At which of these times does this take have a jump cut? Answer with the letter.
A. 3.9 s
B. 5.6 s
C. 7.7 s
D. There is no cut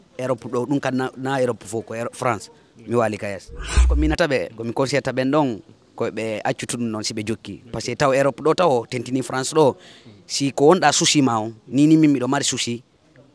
A